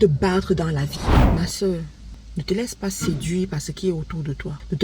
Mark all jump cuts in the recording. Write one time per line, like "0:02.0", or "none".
0:01.2

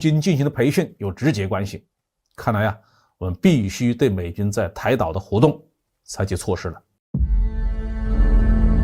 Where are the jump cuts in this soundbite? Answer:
0:06.9

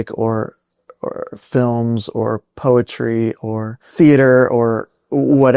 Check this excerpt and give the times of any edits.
0:03.8

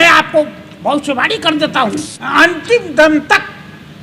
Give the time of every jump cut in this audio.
0:02.1

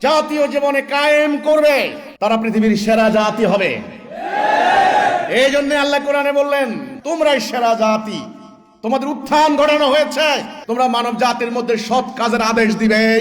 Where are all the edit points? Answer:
0:02.0
0:06.9
0:10.5

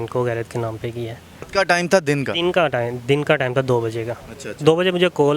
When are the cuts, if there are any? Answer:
0:01.4

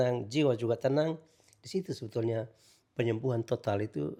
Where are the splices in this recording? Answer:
none

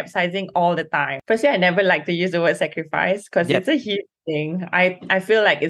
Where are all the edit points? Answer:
0:01.1

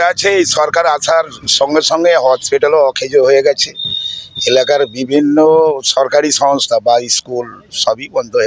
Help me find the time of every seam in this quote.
none

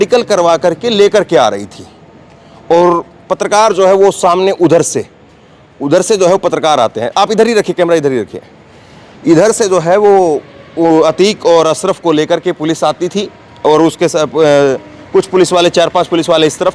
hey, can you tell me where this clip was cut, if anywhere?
none

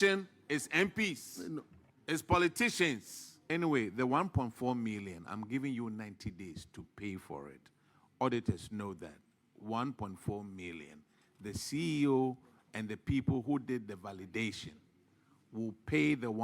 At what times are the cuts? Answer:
0:03.4

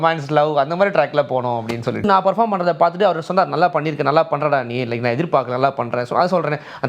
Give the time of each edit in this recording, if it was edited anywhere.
0:02.0

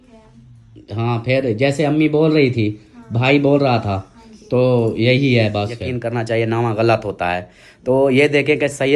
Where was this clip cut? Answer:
0:05.9

